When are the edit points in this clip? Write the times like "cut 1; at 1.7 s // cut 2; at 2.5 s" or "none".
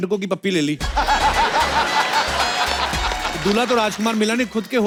none